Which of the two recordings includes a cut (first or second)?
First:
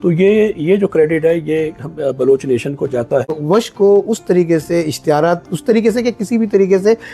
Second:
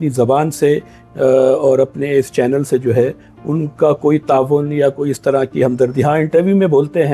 first